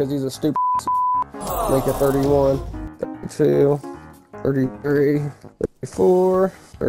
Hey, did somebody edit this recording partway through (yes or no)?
no